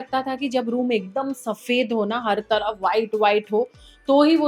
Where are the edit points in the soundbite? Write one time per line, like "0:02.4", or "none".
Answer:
none